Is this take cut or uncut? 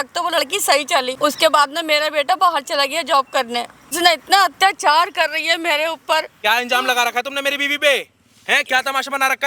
cut